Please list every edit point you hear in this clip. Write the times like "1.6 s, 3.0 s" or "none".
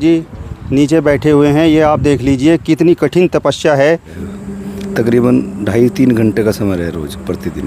4.2 s